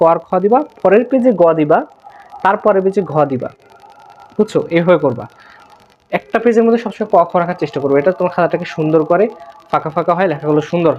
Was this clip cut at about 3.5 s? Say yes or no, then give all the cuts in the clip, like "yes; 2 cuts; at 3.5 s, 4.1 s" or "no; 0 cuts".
no; 0 cuts